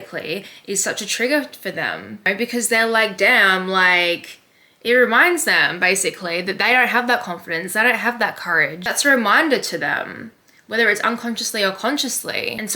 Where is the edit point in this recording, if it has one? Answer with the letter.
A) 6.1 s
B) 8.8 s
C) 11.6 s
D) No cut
B